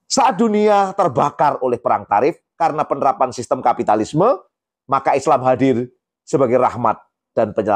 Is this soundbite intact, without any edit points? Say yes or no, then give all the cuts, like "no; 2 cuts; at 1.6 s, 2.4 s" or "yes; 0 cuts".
no; 1 cut; at 2.5 s